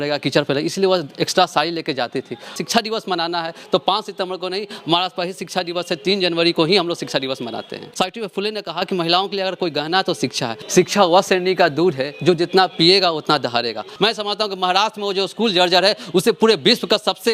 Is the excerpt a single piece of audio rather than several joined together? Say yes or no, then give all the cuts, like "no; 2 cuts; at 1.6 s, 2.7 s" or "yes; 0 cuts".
no; 4 cuts; at 2.6 s, 7.8 s, 10.6 s, 13.9 s